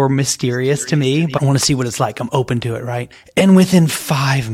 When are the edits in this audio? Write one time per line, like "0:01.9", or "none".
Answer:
0:01.4
0:03.1